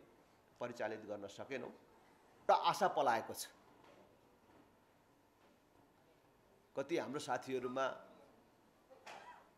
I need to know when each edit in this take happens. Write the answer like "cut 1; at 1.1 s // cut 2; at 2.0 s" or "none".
cut 1; at 2.5 s